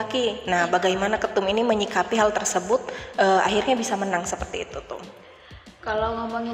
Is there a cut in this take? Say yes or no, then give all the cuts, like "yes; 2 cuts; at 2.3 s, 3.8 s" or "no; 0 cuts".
no; 0 cuts